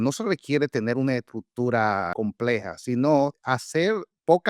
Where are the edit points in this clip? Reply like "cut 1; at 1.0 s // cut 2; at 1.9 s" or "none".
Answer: cut 1; at 2.1 s // cut 2; at 3.4 s